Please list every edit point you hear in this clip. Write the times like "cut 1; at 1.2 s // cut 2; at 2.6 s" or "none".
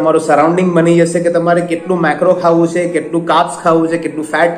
none